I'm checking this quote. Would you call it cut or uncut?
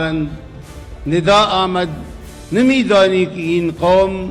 uncut